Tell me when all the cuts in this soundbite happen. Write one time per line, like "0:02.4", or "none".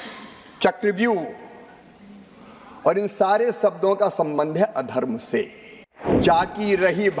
0:06.2